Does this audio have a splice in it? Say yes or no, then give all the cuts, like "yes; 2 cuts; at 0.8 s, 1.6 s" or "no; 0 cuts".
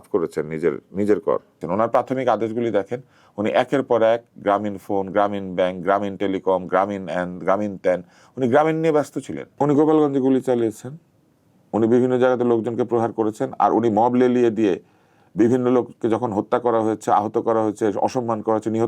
yes; 2 cuts; at 1.5 s, 9.5 s